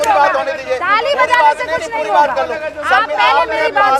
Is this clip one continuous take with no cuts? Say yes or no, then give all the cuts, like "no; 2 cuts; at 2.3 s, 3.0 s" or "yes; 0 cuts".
yes; 0 cuts